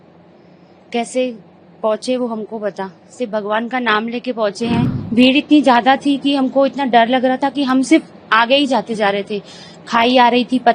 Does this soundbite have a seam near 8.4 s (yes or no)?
no